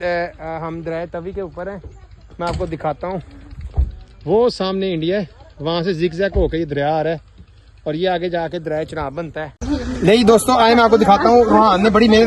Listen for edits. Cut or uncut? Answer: cut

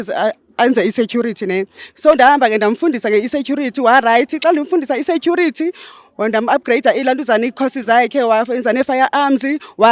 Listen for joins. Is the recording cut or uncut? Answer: uncut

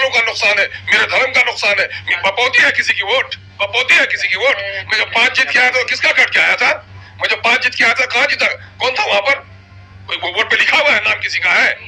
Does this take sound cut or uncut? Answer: cut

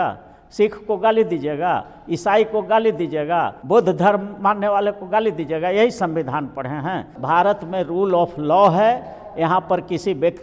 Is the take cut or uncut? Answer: cut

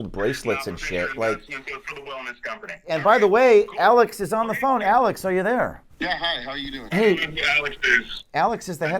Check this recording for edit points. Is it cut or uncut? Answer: cut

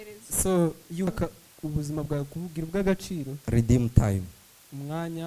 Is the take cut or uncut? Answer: cut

